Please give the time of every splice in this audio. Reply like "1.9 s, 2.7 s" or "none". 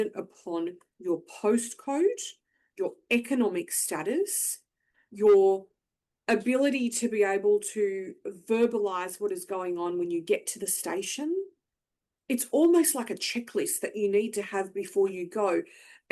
none